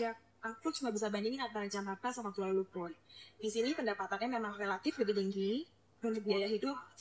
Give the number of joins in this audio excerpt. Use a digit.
0